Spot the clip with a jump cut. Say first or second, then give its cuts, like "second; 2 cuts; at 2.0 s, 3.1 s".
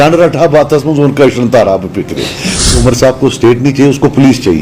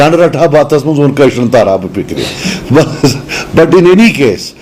first; 1 cut; at 2.8 s